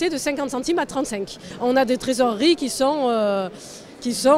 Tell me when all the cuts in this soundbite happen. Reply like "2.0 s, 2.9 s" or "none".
1.4 s